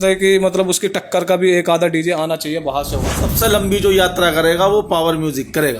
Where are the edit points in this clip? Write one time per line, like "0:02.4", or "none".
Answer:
0:03.2